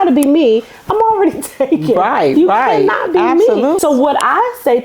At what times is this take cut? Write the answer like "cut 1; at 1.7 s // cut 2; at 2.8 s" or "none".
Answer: cut 1; at 3.8 s

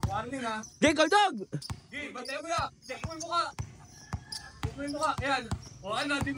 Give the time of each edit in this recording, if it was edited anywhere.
none

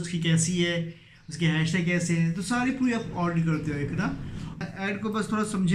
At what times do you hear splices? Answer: cut 1; at 4.7 s

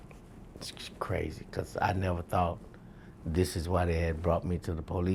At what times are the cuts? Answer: none

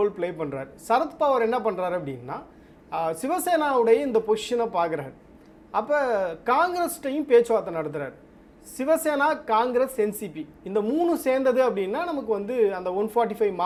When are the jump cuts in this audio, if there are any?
none

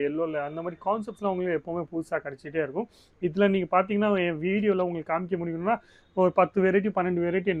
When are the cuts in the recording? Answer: none

